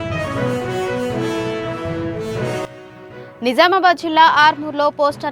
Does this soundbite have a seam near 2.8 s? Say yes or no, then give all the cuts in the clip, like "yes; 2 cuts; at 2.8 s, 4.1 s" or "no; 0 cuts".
yes; 1 cut; at 2.8 s